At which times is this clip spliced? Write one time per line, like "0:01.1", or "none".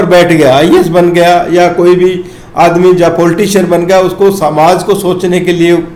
none